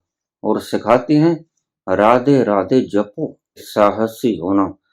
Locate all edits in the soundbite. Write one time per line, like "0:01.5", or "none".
0:03.7

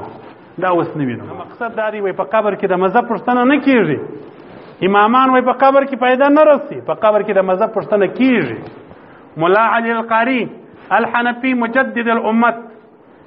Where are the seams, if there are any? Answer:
0:01.6

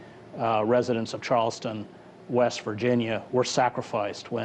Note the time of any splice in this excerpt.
none

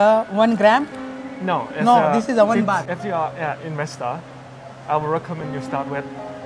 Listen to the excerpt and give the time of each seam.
0:02.9

